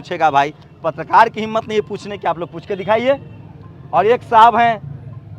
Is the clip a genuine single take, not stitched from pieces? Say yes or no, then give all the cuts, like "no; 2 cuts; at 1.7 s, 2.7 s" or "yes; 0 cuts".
yes; 0 cuts